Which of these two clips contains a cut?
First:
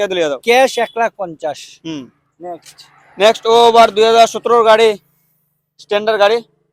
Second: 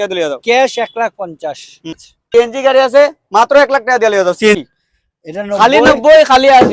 second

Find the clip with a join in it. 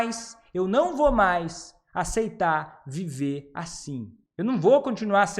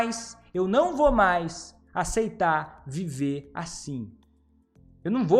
first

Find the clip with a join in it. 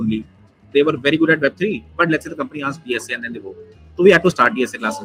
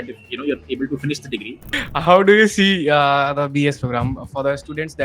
second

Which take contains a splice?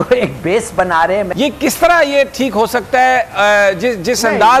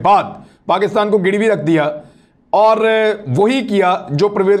first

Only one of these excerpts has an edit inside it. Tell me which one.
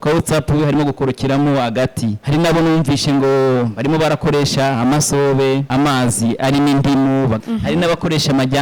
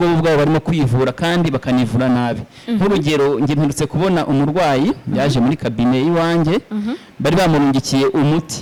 first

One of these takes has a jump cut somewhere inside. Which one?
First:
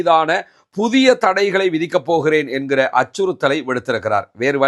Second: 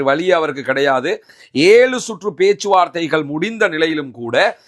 second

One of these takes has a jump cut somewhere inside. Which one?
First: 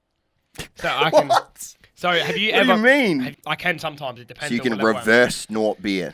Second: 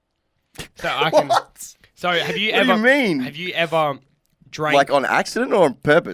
first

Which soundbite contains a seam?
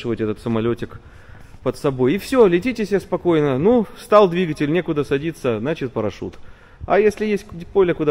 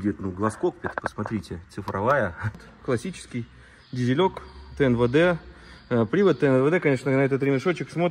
second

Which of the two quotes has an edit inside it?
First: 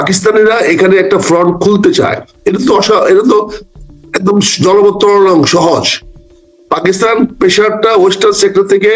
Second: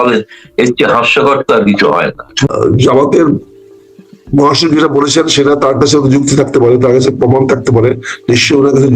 second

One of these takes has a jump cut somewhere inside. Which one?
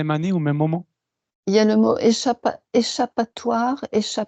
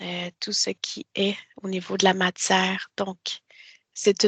first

